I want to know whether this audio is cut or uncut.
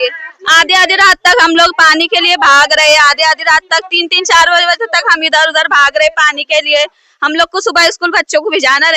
uncut